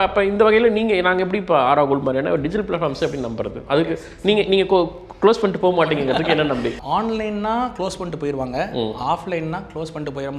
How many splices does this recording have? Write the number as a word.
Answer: one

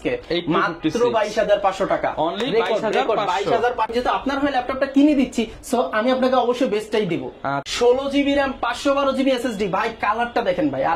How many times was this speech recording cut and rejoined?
two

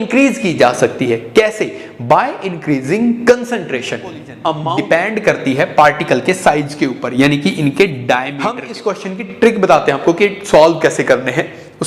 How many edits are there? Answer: two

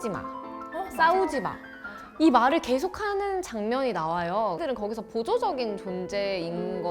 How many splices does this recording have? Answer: one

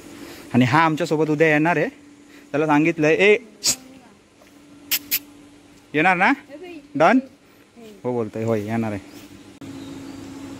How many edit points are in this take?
one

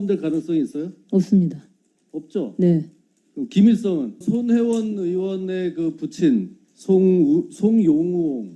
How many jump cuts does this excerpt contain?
one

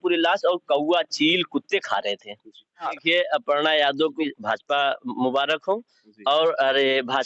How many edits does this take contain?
two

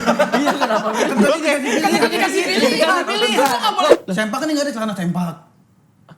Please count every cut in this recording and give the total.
one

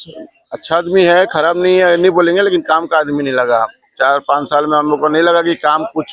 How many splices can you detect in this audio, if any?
zero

